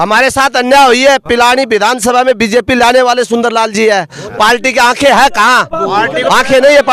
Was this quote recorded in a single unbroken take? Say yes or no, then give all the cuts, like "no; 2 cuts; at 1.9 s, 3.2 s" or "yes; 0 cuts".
yes; 0 cuts